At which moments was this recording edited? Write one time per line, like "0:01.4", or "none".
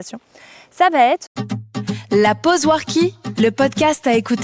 0:01.4